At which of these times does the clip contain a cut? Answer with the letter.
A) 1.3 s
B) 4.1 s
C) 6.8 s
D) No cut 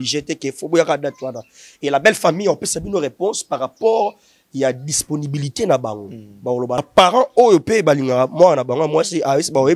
C